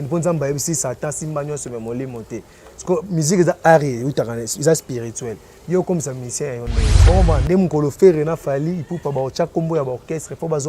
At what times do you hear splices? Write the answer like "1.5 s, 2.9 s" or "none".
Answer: 6.9 s